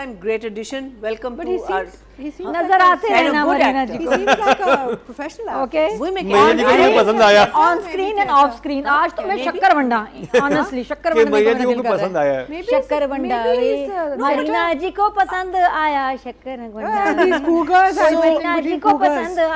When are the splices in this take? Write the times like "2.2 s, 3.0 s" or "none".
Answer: none